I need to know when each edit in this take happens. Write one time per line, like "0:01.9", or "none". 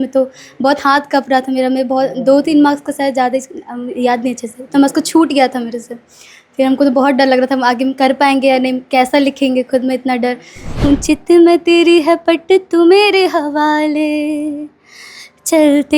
0:10.8